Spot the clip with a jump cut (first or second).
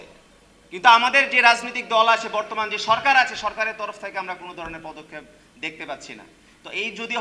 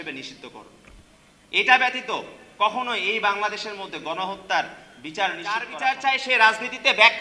second